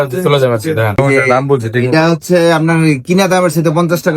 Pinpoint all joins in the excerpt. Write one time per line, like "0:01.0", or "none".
0:01.0